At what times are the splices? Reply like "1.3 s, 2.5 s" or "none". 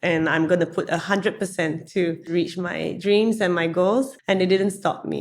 2.2 s, 4.2 s

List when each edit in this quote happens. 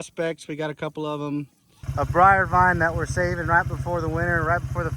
1.6 s

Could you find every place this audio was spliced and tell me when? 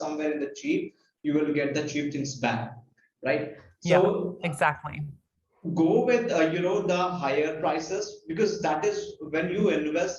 none

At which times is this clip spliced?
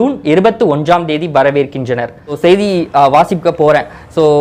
2.4 s

